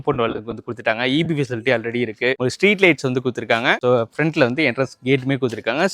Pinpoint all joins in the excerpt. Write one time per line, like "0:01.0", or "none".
none